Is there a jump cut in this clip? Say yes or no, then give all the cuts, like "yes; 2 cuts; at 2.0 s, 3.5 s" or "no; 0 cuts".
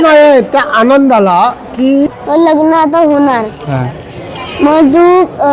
yes; 1 cut; at 2.2 s